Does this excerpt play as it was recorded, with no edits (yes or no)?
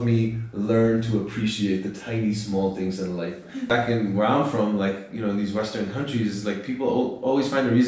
no